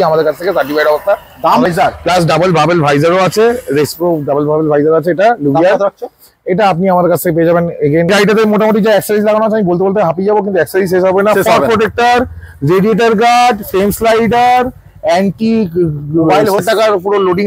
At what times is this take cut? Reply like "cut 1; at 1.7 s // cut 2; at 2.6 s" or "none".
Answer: cut 1; at 1.7 s // cut 2; at 8.1 s // cut 3; at 16.6 s